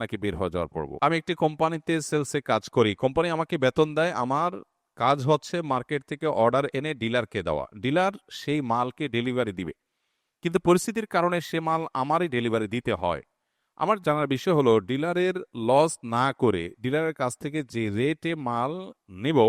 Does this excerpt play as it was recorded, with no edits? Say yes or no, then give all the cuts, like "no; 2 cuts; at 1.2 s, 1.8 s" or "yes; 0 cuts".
no; 1 cut; at 0.9 s